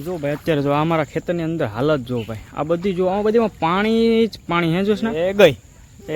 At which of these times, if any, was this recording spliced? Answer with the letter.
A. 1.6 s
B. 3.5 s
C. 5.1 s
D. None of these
C